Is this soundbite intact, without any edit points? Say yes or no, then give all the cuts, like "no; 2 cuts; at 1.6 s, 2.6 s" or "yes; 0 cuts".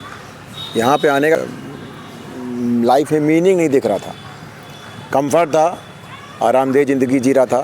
no; 1 cut; at 1.4 s